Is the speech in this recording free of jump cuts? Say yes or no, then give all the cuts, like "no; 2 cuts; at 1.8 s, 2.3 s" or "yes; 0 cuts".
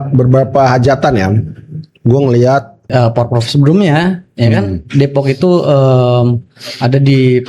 no; 1 cut; at 2.9 s